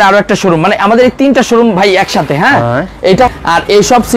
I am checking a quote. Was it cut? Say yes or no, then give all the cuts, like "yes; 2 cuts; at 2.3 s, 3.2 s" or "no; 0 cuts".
yes; 1 cut; at 3.3 s